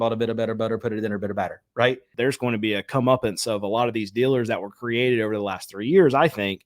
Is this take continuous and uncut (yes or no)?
no